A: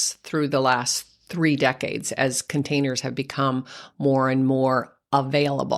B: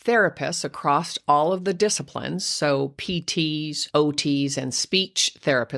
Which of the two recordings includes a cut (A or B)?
B